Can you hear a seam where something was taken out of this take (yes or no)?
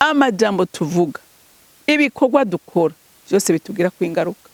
no